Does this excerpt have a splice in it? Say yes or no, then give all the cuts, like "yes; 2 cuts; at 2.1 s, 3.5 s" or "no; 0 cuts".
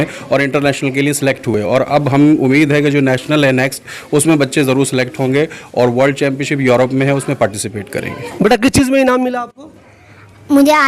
no; 0 cuts